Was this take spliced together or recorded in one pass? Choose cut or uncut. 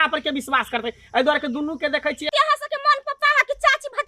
cut